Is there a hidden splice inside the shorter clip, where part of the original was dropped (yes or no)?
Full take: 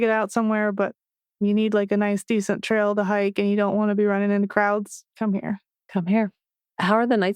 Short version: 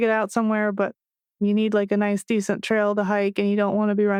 no